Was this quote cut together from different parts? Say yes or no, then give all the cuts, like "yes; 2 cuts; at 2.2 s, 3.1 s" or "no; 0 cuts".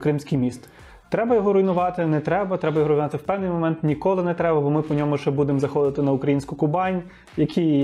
no; 0 cuts